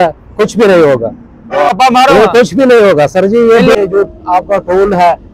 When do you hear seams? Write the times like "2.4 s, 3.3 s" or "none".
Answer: 1.7 s, 3.8 s